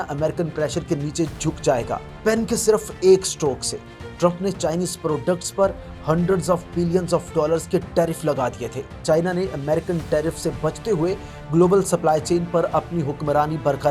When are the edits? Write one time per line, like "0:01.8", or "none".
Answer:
0:02.1
0:09.0